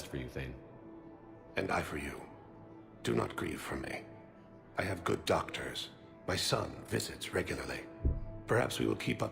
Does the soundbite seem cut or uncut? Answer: cut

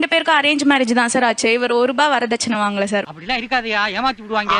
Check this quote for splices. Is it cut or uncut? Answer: cut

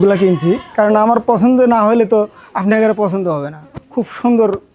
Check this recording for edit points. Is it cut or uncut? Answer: uncut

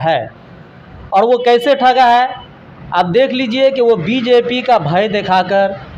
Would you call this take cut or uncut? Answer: uncut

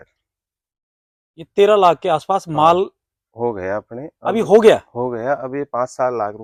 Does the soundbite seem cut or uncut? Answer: uncut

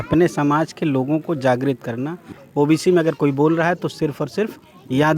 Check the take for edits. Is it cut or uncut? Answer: cut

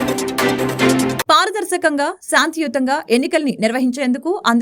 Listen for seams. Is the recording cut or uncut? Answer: cut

